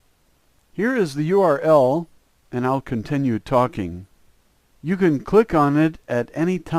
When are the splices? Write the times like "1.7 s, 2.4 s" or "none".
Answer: 2.0 s